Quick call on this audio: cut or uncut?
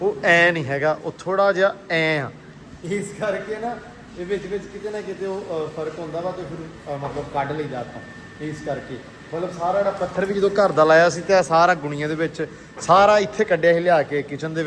uncut